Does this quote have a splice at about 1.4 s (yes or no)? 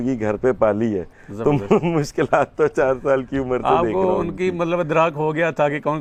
no